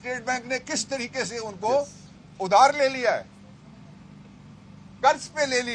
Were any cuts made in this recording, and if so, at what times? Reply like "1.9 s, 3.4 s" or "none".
none

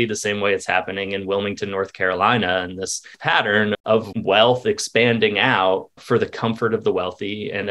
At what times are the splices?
3.2 s, 4.1 s

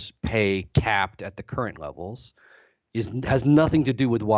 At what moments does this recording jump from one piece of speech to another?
none

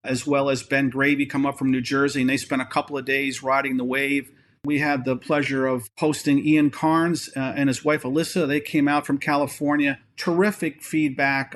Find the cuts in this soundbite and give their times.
4.6 s

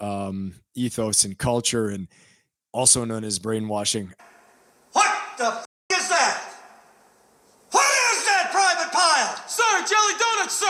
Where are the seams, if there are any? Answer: none

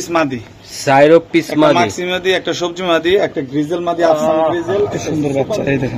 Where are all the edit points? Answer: 5.0 s

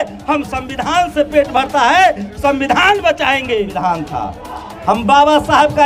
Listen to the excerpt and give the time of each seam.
3.7 s

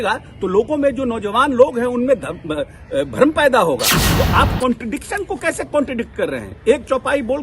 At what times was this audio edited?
4.0 s

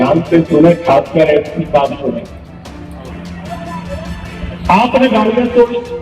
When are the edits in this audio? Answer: 3.1 s

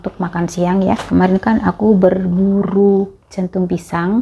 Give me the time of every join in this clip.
1.0 s

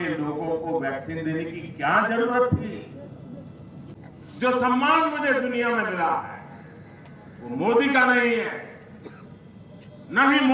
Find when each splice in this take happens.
3.9 s

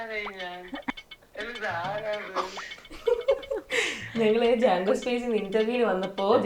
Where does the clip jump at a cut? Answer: 0.9 s

